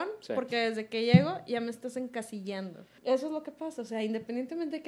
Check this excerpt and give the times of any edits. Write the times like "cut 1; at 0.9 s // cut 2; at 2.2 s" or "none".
cut 1; at 2.8 s

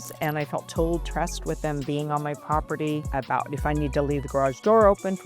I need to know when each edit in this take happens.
cut 1; at 3.1 s

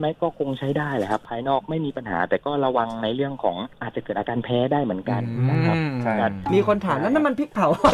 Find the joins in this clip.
cut 1; at 1.3 s // cut 2; at 3.7 s // cut 3; at 6.4 s

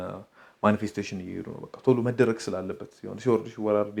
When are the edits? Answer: none

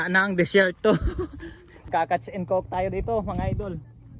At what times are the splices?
cut 1; at 1.9 s

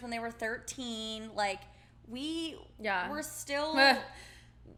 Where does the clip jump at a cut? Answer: none

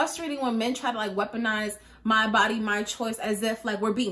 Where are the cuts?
none

